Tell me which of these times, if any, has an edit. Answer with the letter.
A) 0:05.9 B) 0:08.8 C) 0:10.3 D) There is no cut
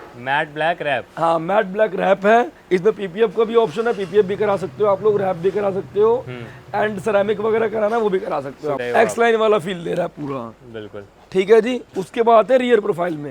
B